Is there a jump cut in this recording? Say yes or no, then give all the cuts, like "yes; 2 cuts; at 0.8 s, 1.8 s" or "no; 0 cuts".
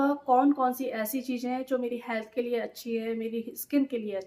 no; 0 cuts